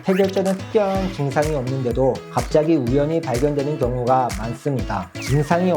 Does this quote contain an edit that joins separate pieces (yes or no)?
yes